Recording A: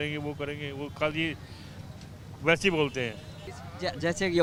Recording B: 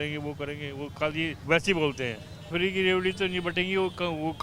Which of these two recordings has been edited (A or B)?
B